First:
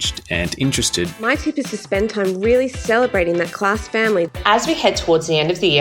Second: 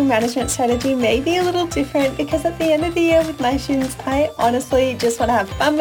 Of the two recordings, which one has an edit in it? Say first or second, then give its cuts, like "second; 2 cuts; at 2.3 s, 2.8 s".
first; 2 cuts; at 1.1 s, 4.4 s